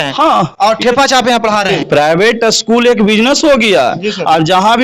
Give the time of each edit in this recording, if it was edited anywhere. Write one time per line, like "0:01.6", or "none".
0:01.7